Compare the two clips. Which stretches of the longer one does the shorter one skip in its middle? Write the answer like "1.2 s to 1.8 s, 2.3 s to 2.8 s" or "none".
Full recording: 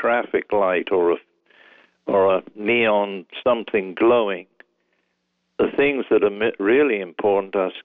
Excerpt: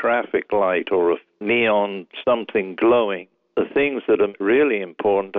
1.3 s to 2.5 s, 4.5 s to 5.4 s, 6.4 s to 6.5 s